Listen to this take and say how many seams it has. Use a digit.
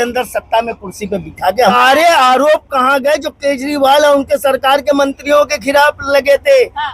1